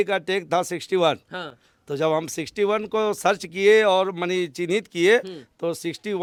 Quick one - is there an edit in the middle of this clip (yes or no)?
no